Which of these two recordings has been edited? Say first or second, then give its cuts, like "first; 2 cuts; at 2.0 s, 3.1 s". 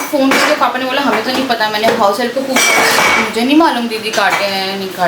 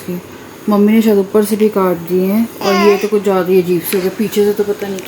second; 1 cut; at 2.5 s